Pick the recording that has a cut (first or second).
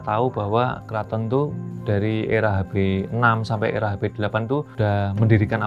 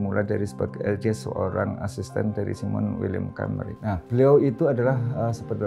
first